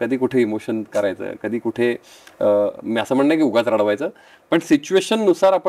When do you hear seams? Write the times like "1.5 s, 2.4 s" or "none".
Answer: none